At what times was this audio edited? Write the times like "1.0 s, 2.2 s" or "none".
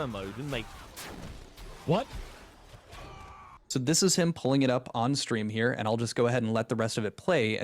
5.1 s